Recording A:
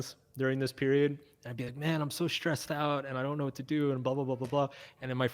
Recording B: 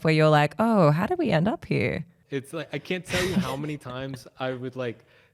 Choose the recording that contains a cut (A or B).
B